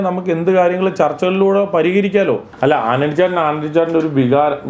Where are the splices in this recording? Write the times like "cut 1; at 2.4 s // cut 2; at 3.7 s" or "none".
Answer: cut 1; at 2.5 s